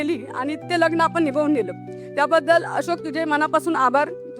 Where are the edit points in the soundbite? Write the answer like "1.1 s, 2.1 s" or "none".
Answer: none